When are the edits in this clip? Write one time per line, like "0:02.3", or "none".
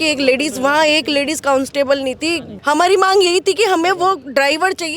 0:02.5